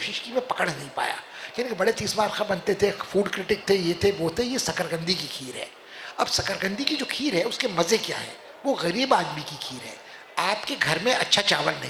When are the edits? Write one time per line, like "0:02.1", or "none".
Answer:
none